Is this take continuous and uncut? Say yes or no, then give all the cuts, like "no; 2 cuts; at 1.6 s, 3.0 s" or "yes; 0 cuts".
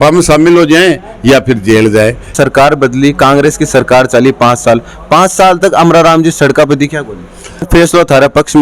no; 2 cuts; at 2.3 s, 7.7 s